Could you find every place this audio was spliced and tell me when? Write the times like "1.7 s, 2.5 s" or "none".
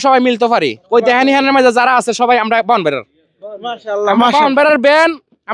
none